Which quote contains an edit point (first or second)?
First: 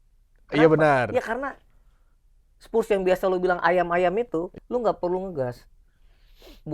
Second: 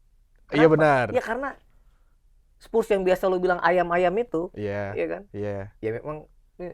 first